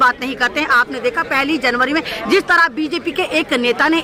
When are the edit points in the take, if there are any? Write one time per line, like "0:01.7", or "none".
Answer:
none